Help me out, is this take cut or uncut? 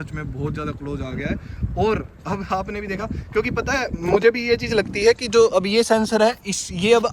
uncut